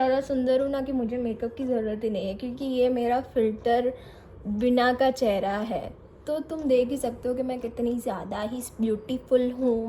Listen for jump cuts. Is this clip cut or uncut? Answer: uncut